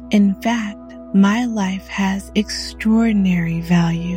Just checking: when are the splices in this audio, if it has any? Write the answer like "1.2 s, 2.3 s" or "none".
none